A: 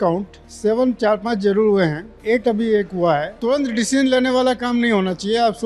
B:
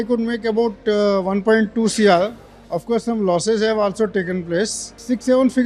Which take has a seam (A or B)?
A